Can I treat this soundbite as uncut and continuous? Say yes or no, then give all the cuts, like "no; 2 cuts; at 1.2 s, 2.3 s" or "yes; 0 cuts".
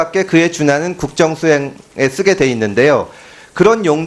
no; 1 cut; at 1.1 s